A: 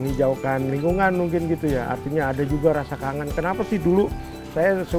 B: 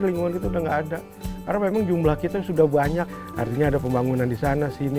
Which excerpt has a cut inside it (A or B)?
B